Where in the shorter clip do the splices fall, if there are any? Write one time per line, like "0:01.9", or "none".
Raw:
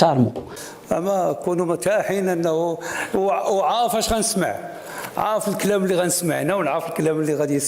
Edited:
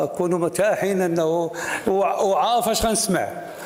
none